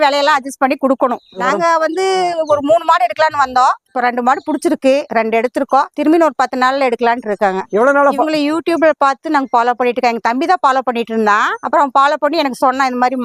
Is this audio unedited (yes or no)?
yes